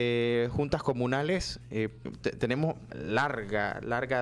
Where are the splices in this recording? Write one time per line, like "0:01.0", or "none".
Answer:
0:02.1
0:02.9